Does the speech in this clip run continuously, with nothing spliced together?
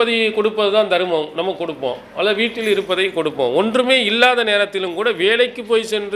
yes; 0 cuts

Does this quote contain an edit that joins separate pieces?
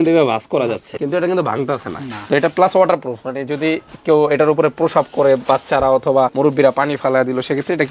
no; 0 cuts

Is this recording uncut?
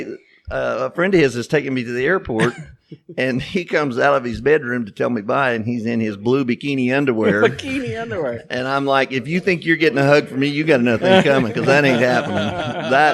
yes; 0 cuts

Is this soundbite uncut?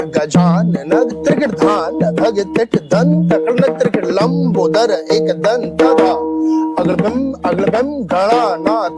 yes; 0 cuts

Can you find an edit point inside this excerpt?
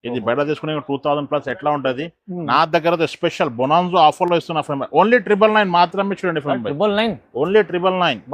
no; 0 cuts

